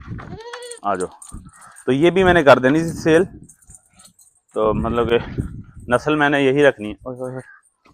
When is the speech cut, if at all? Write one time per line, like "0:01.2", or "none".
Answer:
none